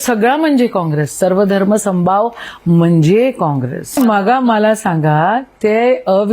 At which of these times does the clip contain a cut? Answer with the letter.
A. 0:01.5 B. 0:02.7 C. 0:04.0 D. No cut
C